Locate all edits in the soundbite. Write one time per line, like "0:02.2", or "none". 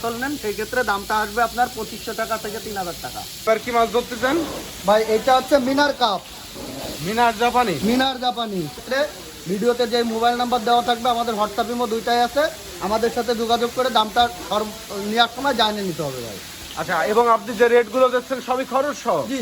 0:03.4
0:08.8